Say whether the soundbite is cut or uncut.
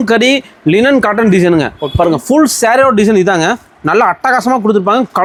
uncut